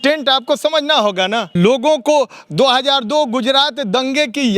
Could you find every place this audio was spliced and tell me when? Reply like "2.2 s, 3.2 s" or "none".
1.5 s